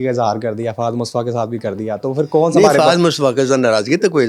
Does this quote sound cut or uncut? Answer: uncut